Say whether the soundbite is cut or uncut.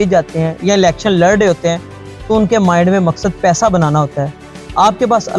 uncut